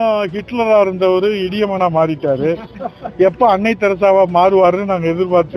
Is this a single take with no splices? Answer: yes; 0 cuts

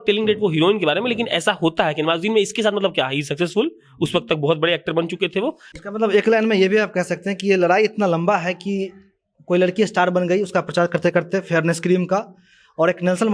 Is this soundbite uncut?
no; 1 cut; at 5.6 s

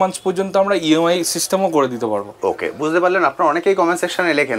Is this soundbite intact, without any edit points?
yes; 0 cuts

